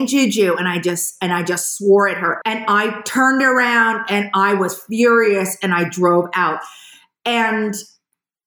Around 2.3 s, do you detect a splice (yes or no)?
yes